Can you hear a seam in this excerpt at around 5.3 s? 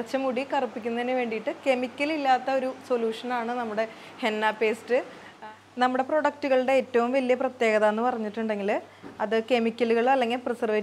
yes; 1 cut; at 5.3 s

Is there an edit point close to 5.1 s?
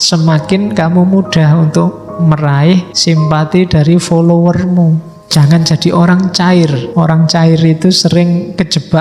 yes; 3 cuts; at 2.9 s, 5.1 s, 6.8 s

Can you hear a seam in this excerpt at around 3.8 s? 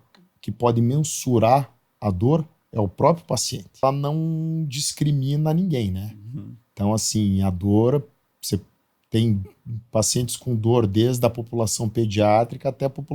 yes; 1 cut; at 3.8 s

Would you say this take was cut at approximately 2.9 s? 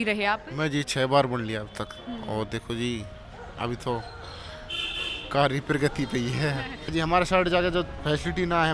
no; 1 cut; at 6.9 s

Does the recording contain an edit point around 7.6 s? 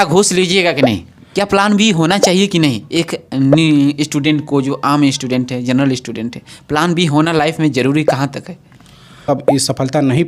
no; 2 cuts; at 1.2 s, 9.2 s

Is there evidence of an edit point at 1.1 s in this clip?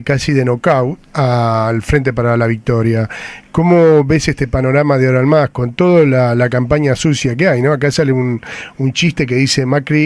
no; 0 cuts

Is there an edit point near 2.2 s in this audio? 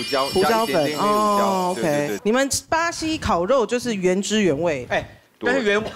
yes; 1 cut; at 2.2 s

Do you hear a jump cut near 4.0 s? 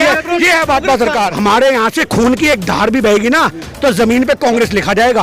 no; 1 cut; at 1.3 s

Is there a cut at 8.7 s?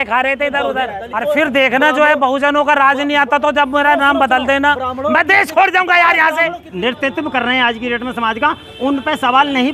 no; 2 cuts; at 1.0 s, 6.7 s

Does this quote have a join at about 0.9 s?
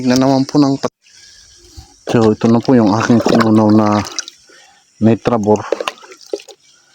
yes; 1 cut; at 0.9 s

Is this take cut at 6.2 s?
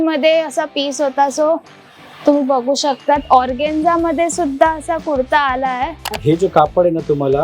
yes; 1 cut; at 6.2 s

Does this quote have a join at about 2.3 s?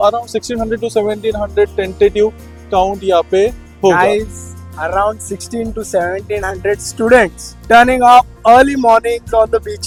no; 0 cuts

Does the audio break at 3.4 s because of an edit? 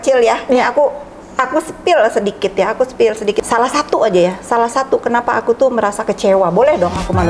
yes; 1 cut; at 3.4 s

